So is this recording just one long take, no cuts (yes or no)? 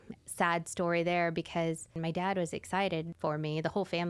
no